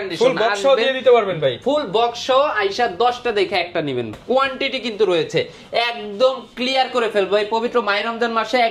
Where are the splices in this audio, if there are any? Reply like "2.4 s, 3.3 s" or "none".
4.1 s